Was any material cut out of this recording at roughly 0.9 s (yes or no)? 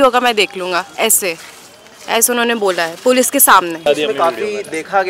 no